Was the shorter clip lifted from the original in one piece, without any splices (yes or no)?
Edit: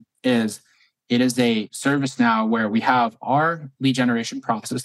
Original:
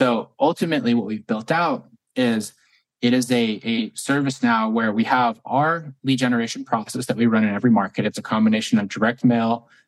no